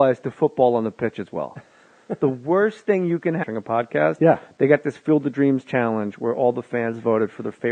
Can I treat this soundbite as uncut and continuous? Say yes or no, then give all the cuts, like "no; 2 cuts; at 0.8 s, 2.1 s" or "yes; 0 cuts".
yes; 0 cuts